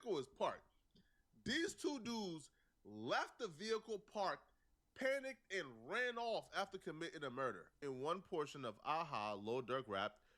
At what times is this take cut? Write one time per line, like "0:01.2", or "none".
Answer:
0:07.8